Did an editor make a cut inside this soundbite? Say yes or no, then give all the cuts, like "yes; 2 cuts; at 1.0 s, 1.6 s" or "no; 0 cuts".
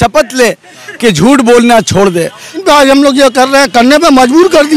yes; 1 cut; at 2.6 s